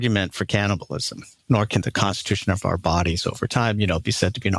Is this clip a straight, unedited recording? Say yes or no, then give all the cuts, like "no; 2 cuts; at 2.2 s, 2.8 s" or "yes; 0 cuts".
yes; 0 cuts